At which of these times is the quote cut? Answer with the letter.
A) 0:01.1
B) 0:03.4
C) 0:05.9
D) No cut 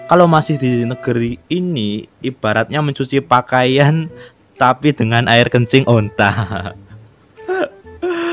D